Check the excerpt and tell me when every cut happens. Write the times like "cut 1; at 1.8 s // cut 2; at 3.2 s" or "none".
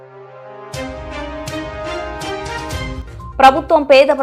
none